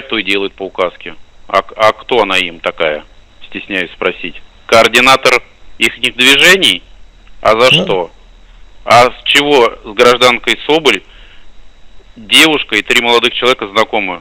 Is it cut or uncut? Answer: uncut